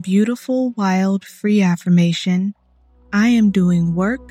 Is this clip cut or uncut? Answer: uncut